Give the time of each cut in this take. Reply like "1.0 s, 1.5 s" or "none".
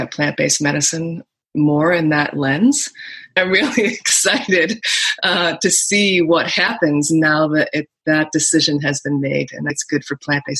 3.4 s, 9.7 s